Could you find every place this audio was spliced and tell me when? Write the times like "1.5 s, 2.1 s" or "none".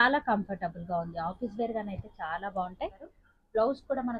3.1 s